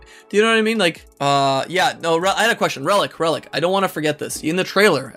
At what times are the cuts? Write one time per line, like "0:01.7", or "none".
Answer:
0:01.1